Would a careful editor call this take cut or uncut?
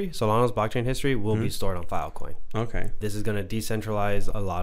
cut